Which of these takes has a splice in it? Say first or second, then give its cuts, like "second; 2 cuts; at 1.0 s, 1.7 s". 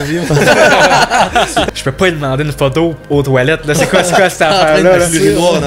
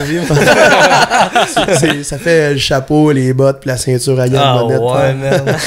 first; 1 cut; at 1.7 s